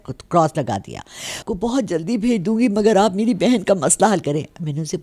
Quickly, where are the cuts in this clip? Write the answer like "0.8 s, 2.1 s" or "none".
1.4 s